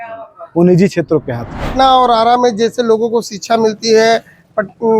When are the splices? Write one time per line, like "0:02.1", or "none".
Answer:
0:01.7